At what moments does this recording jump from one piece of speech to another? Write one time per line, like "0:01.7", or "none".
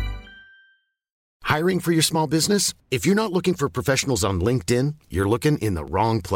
0:01.2